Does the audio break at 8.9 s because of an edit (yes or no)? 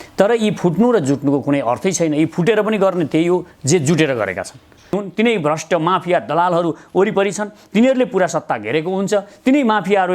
no